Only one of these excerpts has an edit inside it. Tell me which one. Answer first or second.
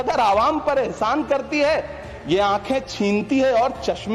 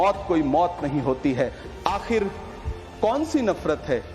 second